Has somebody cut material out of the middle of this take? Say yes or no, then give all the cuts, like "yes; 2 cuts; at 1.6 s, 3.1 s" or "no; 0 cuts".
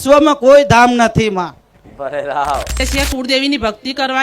yes; 1 cut; at 2.8 s